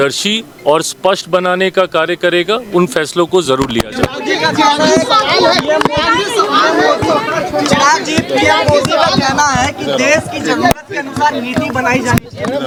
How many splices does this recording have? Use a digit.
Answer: 0